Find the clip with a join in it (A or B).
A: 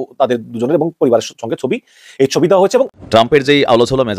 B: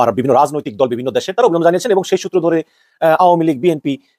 A